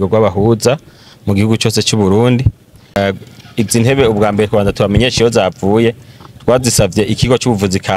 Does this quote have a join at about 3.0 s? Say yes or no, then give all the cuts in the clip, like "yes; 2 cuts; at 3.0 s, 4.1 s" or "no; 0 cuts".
yes; 1 cut; at 3.0 s